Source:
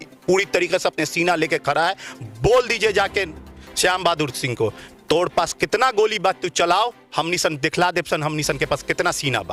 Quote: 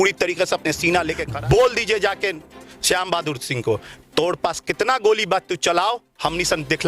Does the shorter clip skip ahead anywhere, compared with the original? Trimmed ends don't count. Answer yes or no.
yes